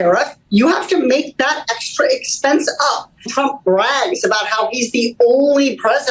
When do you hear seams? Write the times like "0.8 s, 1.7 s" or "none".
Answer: 3.3 s